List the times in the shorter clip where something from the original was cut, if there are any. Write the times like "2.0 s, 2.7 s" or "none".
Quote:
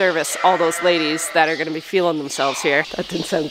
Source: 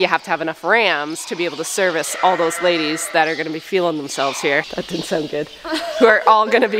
none